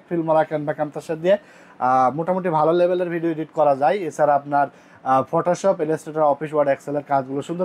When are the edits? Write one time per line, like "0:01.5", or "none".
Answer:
none